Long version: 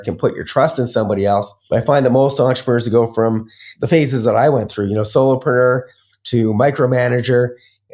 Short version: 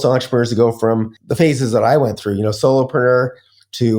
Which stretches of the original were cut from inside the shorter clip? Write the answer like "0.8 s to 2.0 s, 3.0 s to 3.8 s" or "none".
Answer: 3.5 s to 3.7 s